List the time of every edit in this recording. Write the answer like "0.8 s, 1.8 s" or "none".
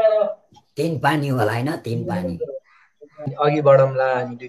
3.3 s